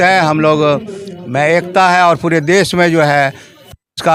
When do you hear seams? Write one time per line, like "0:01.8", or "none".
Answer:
none